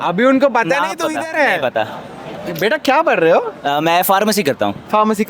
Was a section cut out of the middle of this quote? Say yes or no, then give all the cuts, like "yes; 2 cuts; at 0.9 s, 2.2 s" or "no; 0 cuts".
no; 0 cuts